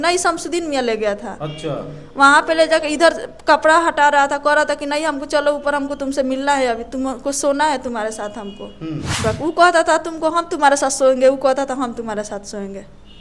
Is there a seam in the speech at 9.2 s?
yes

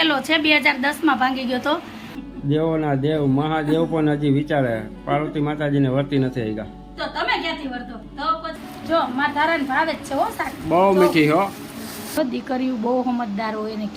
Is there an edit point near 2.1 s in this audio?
yes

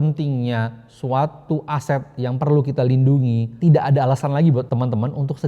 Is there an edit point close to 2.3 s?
no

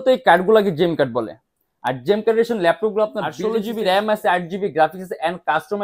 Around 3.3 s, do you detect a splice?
yes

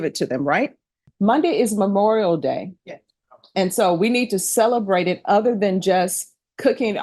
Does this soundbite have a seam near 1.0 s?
yes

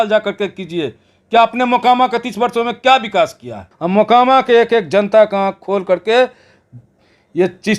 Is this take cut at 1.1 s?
no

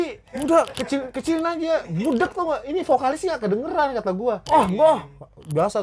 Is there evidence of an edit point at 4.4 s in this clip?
yes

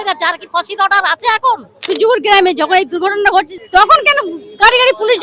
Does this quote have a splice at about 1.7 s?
yes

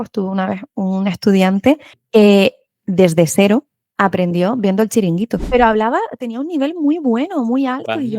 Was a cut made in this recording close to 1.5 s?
no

